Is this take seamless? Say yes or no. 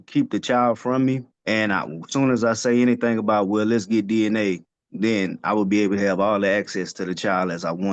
no